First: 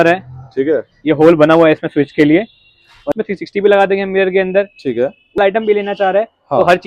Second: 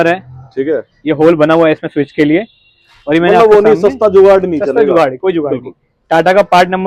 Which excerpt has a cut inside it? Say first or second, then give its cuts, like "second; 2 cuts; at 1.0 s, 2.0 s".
first; 2 cuts; at 3.1 s, 5.4 s